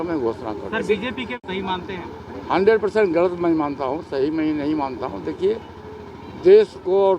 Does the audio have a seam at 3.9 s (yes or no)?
no